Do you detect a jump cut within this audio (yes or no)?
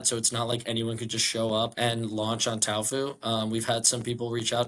yes